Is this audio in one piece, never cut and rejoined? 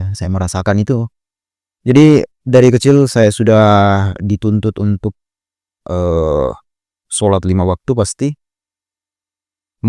yes; 0 cuts

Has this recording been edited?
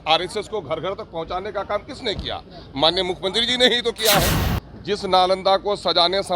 yes; 1 cut; at 4.4 s

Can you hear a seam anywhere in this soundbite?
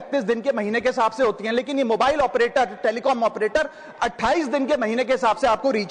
no; 0 cuts

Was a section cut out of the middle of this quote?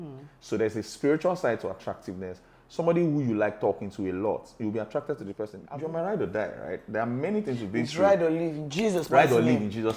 yes; 1 cut; at 5.6 s

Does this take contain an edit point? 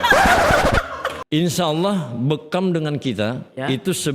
yes; 1 cut; at 1.2 s

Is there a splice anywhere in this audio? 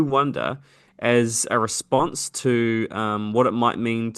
no; 0 cuts

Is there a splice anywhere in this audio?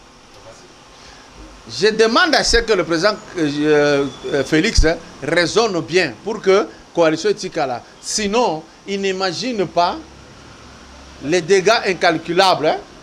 no; 0 cuts

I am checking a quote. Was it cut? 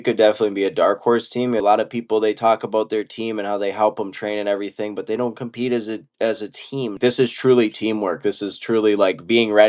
yes; 2 cuts; at 1.6 s, 6.9 s

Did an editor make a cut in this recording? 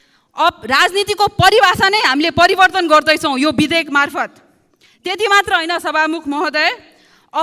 no; 0 cuts

